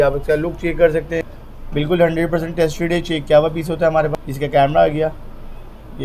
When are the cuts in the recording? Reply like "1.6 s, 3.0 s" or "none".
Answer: 1.3 s, 4.1 s